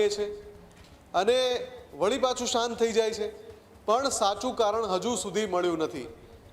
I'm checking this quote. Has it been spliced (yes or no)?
no